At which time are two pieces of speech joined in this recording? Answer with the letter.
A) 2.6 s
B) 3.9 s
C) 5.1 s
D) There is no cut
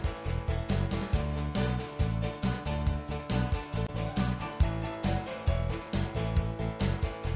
D